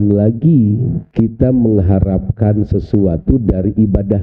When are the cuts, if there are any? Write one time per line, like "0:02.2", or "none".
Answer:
0:01.0